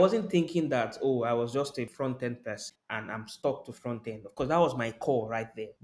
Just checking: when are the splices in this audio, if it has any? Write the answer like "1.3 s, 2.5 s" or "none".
1.9 s, 2.7 s